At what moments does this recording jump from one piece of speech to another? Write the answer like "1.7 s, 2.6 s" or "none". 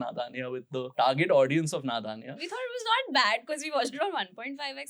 0.9 s, 2.4 s